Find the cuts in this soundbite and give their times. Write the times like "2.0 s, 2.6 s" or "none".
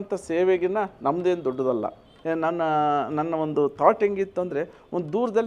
2.1 s